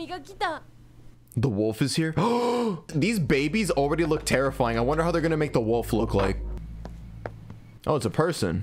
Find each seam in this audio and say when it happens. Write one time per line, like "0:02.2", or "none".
0:02.9
0:06.5
0:07.7